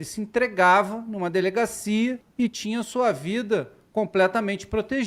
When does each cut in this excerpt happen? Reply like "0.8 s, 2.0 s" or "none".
2.2 s